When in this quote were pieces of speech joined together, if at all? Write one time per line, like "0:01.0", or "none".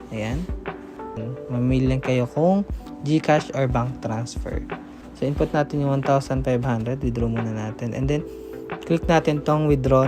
0:01.2